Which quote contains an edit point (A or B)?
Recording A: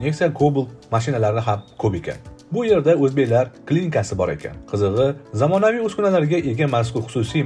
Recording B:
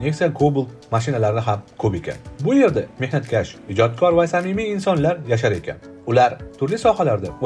A